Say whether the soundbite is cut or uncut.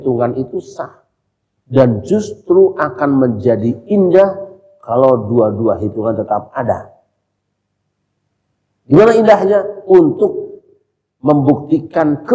uncut